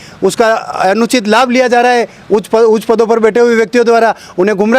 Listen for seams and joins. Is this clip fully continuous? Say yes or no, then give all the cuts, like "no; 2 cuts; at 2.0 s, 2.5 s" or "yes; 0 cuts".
yes; 0 cuts